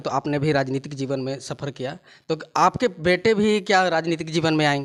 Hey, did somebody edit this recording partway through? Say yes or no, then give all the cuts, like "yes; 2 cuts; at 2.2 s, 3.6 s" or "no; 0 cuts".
no; 0 cuts